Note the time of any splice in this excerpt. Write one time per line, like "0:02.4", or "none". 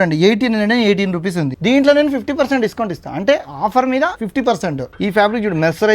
0:01.5
0:04.6